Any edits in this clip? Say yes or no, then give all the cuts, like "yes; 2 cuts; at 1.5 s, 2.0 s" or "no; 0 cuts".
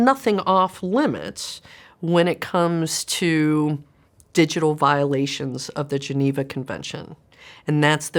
no; 0 cuts